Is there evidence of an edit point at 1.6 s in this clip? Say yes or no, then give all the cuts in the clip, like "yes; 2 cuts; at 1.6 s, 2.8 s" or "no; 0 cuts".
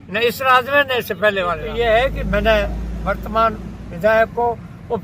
yes; 1 cut; at 1.6 s